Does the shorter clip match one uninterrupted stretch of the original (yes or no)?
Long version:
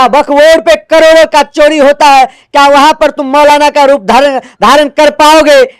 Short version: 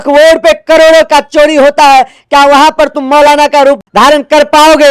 no